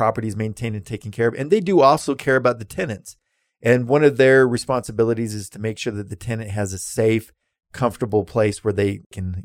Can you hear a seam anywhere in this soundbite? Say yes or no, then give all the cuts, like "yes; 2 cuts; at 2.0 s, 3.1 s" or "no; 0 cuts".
no; 0 cuts